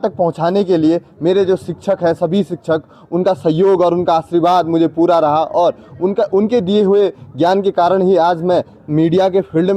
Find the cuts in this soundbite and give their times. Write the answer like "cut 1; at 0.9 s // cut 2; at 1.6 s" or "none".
none